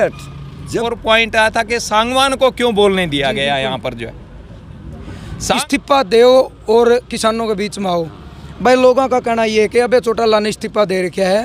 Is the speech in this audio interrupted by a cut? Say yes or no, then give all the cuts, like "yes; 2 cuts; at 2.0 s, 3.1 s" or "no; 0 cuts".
yes; 2 cuts; at 0.9 s, 5.6 s